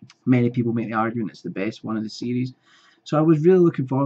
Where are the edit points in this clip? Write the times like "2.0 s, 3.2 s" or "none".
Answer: 2.1 s